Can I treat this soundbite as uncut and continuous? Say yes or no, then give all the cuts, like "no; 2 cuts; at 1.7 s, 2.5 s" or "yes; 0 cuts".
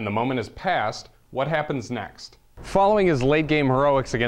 no; 1 cut; at 2.6 s